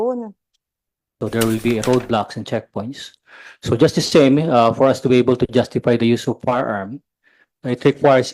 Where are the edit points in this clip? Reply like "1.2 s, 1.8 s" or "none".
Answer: 1.2 s